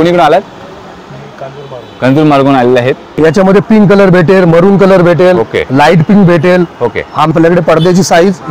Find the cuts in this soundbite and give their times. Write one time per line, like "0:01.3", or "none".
0:03.1
0:07.3